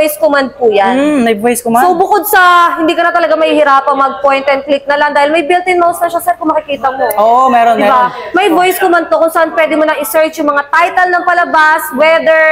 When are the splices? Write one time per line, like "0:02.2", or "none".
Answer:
none